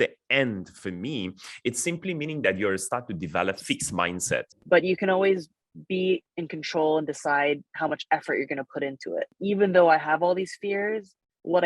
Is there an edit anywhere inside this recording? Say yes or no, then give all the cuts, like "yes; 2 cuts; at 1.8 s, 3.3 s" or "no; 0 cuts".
yes; 2 cuts; at 4.5 s, 9.3 s